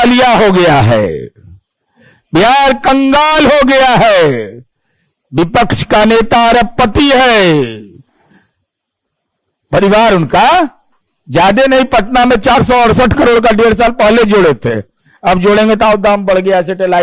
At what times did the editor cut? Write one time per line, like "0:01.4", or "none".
none